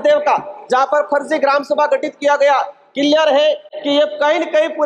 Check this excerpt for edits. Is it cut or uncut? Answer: uncut